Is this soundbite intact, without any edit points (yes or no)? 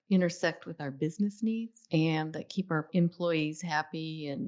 no